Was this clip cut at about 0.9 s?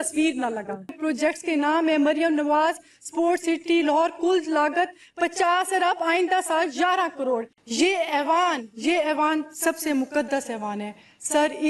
yes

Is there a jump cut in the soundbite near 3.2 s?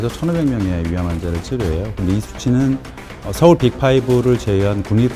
yes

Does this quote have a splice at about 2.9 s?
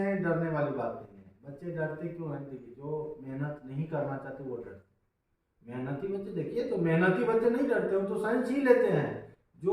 no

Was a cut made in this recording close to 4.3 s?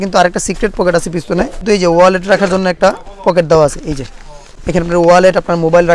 no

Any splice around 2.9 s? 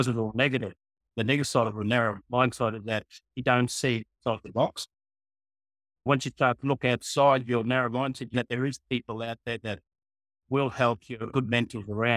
no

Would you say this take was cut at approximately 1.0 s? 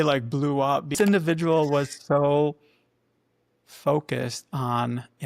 yes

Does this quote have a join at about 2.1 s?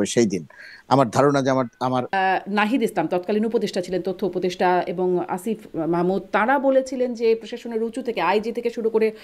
yes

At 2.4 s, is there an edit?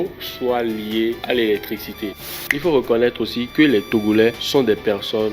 yes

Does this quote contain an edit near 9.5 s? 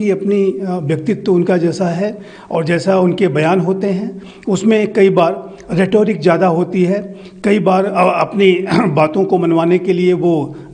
no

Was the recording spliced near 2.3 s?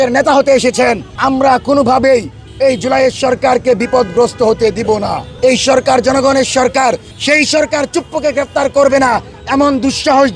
no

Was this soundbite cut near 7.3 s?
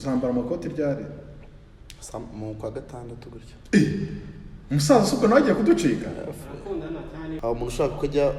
yes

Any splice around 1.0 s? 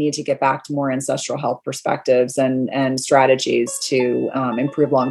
no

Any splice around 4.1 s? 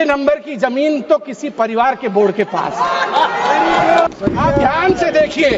yes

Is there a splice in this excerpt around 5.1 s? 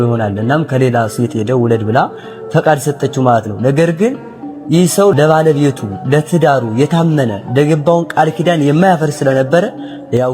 yes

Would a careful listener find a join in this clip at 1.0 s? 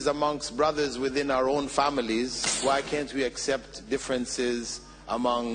no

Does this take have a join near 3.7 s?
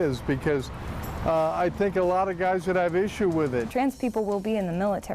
yes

